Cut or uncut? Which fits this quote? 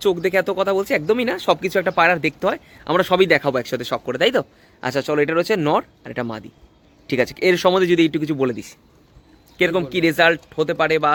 uncut